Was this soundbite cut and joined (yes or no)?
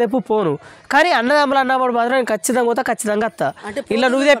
no